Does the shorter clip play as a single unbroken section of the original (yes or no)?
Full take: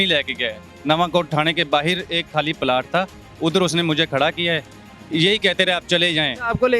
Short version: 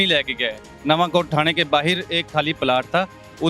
yes